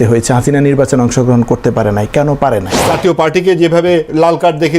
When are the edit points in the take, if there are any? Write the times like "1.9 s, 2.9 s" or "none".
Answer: 2.8 s